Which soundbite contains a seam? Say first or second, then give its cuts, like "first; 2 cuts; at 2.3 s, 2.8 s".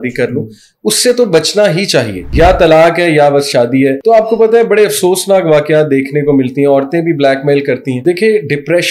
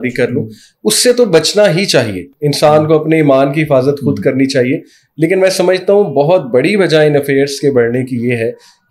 first; 3 cuts; at 2.2 s, 4.0 s, 8.0 s